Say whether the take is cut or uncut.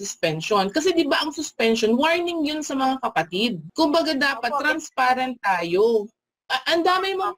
cut